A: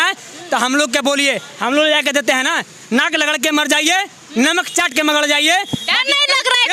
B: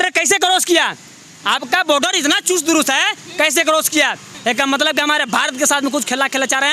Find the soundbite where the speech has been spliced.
B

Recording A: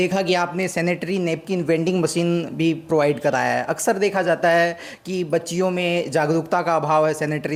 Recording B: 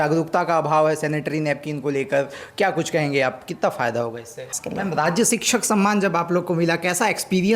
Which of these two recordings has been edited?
B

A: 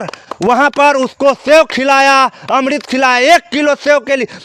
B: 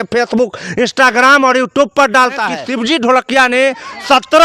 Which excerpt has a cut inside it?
B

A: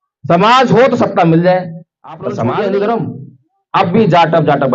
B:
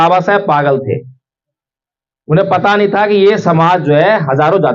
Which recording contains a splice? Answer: A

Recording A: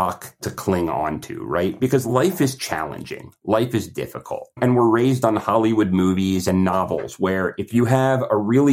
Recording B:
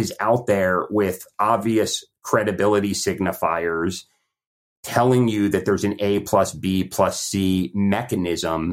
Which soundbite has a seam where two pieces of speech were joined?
A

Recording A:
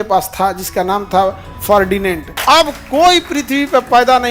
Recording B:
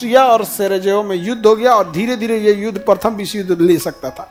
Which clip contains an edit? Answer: A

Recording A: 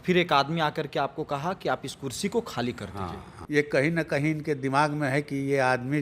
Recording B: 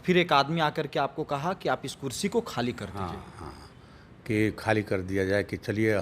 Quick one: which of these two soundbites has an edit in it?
A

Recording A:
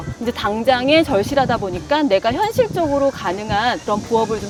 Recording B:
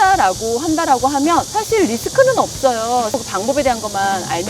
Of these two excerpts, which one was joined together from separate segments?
B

